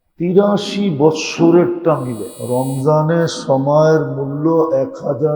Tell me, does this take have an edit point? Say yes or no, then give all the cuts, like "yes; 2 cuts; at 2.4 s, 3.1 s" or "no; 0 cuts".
yes; 1 cut; at 2.3 s